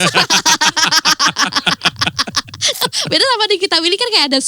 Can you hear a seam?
yes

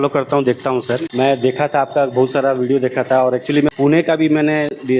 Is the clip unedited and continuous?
no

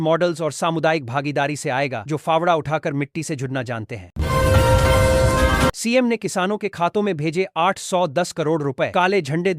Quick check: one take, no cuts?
no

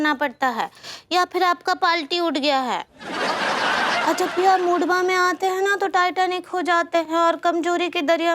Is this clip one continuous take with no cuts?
no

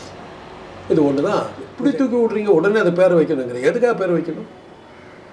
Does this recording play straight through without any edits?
no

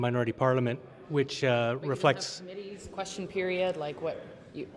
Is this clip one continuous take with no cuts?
no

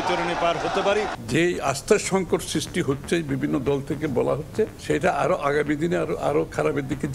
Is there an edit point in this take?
yes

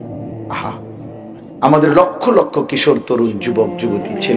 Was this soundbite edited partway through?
no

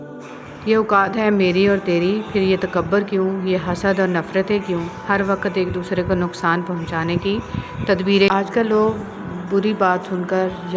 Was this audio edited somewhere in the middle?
yes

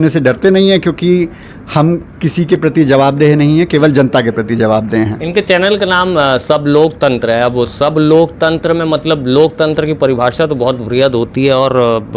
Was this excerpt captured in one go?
yes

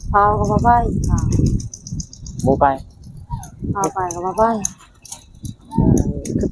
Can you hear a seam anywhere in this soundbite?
no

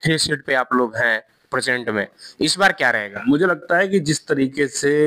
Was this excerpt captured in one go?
yes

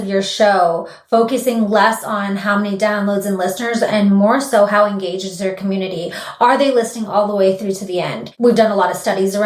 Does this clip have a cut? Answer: yes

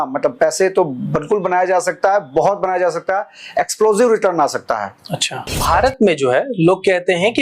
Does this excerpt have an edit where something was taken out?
yes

